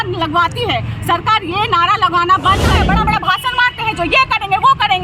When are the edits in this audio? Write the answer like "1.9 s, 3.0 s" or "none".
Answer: 2.7 s